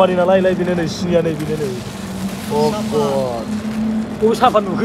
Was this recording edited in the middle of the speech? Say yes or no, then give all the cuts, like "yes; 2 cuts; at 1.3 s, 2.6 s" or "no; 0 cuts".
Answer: no; 0 cuts